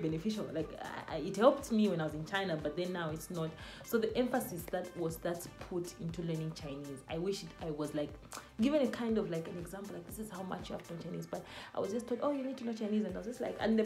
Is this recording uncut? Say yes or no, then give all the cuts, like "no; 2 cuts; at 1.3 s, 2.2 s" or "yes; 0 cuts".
yes; 0 cuts